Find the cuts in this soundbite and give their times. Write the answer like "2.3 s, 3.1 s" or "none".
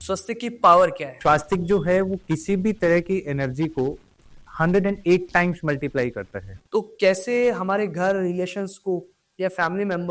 1.1 s, 6.5 s

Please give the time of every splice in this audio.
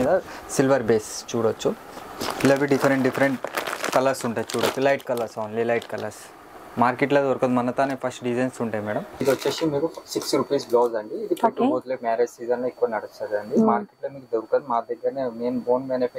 9.1 s

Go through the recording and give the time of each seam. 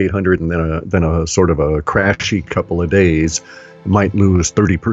none

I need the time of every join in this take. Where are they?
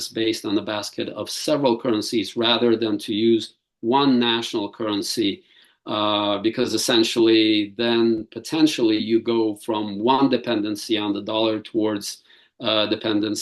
none

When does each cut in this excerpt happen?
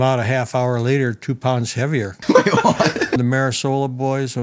2.2 s, 3.2 s

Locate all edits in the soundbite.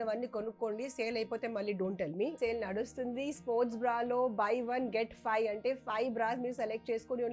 2.3 s

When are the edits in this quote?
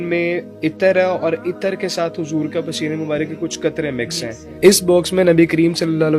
4.4 s

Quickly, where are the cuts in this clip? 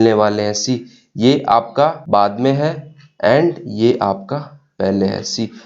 2.0 s

